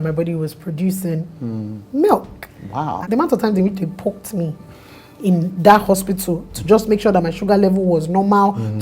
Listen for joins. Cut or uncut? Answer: cut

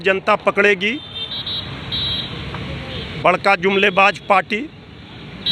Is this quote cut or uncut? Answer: uncut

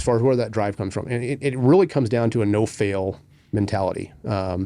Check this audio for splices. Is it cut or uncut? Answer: uncut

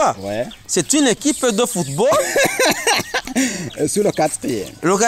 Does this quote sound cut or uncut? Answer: uncut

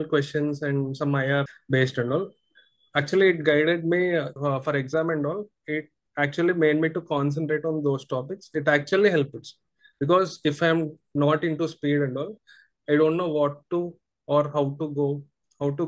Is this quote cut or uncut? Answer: cut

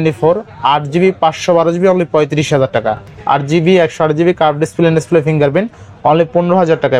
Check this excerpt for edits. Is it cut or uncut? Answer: cut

